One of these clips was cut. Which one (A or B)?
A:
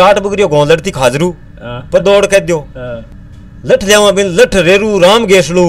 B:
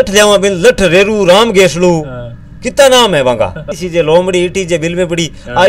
B